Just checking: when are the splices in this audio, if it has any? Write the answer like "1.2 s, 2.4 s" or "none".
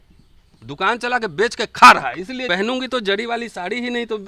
2.5 s